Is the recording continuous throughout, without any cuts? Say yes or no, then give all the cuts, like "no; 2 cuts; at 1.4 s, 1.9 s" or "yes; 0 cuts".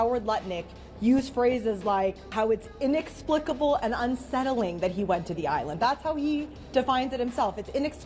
no; 1 cut; at 2.3 s